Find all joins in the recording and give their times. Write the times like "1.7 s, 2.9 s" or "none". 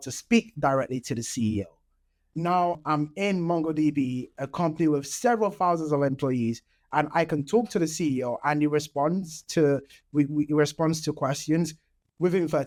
none